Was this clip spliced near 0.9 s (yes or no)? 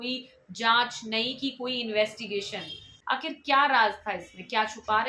no